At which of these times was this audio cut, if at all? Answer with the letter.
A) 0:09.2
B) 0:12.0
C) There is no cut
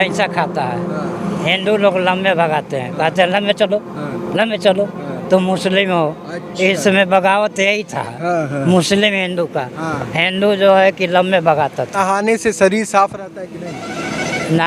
B